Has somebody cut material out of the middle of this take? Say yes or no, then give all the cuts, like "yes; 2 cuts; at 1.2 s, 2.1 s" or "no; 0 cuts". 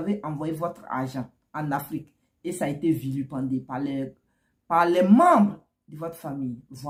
no; 0 cuts